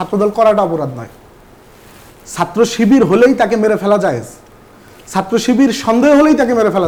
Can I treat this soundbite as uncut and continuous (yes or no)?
yes